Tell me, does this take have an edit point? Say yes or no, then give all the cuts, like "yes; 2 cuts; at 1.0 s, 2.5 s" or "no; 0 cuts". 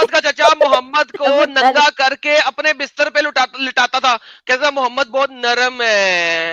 no; 0 cuts